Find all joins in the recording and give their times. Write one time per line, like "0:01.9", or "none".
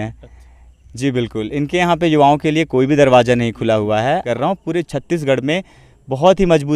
0:04.3